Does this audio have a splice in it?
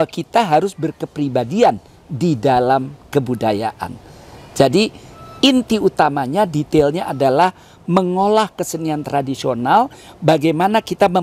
no; 0 cuts

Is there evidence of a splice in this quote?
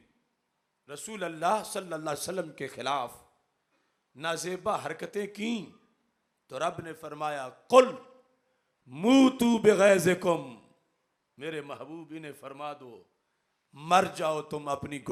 no; 0 cuts

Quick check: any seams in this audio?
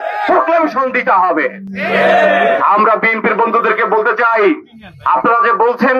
no; 0 cuts

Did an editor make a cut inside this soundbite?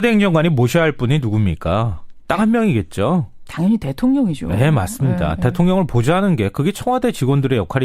yes; 1 cut; at 5.2 s

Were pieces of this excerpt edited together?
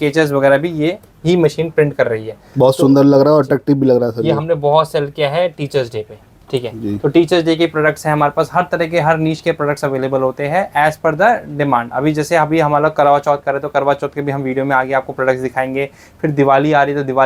no; 0 cuts

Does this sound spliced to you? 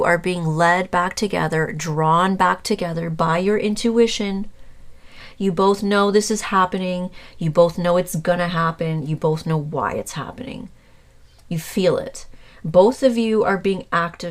no; 0 cuts

